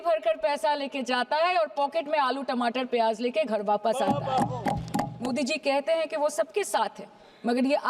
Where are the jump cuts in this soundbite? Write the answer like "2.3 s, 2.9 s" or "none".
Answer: 5.2 s